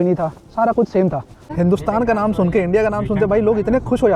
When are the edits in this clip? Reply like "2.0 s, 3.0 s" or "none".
1.5 s